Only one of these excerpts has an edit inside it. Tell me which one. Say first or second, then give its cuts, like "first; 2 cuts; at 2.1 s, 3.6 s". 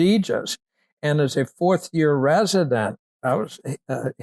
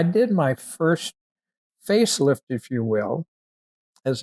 first; 1 cut; at 3.2 s